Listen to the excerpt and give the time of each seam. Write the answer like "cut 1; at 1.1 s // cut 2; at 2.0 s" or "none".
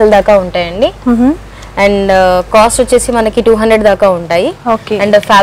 none